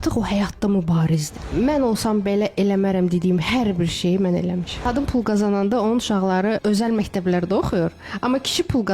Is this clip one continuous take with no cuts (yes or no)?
no